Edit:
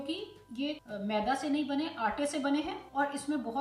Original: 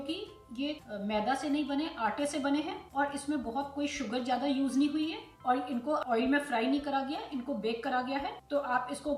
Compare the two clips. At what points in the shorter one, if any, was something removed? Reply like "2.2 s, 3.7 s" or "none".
none